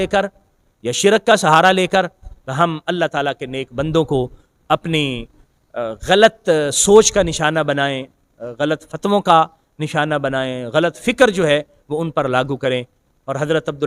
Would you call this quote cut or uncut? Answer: uncut